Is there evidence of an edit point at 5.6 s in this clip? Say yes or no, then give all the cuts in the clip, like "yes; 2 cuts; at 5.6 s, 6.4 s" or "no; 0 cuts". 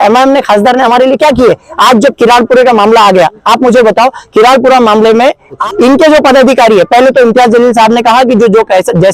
yes; 1 cut; at 5.6 s